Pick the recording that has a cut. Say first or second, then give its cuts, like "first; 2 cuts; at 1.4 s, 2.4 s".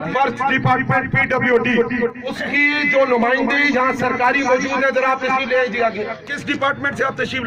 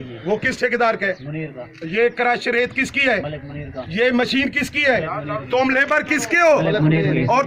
first; 2 cuts; at 2.4 s, 6.3 s